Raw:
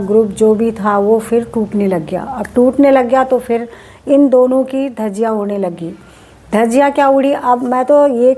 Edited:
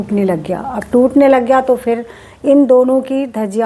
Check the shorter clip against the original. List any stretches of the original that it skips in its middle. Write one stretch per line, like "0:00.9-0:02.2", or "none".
none